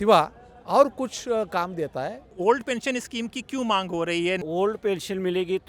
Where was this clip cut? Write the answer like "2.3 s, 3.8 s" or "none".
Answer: 2.3 s, 4.4 s